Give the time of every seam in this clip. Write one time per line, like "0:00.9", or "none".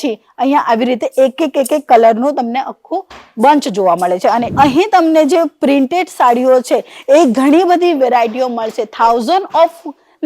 0:04.5